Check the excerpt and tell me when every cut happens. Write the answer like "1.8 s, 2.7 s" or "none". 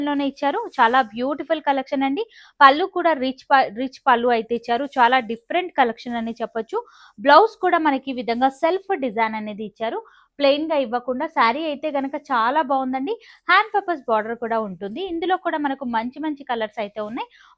none

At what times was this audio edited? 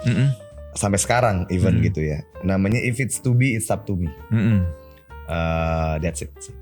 none

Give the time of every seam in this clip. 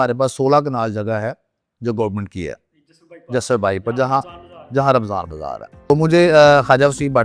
5.9 s

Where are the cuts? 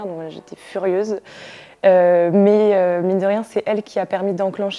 none

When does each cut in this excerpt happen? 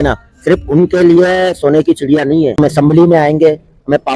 2.5 s

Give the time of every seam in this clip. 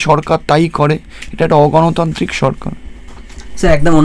none

